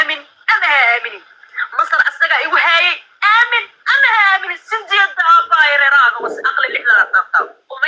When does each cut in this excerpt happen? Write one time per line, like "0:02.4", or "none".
none